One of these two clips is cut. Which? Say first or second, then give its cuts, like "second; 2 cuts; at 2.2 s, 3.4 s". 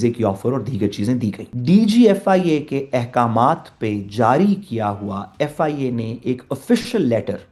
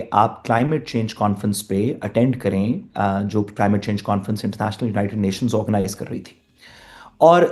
first; 1 cut; at 1.5 s